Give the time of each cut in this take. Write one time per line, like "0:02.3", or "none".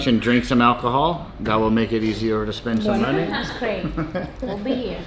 none

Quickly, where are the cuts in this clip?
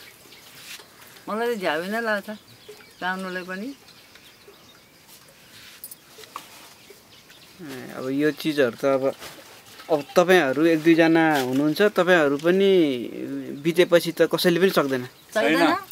none

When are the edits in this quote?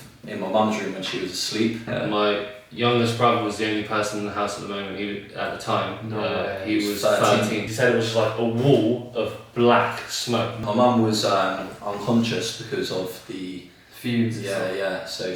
0:01.8
0:07.7
0:10.6

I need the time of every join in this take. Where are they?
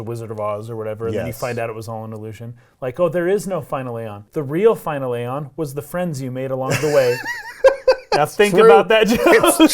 0:04.2

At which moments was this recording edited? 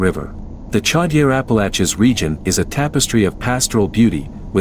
none

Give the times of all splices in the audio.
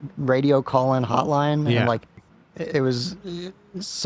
0:02.1

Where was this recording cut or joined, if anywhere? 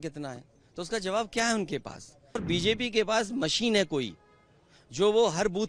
0:02.4

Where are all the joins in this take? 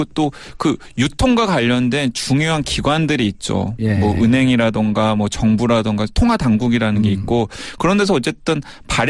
none

